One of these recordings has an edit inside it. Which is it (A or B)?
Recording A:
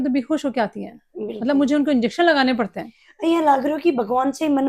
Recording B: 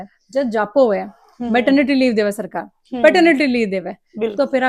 A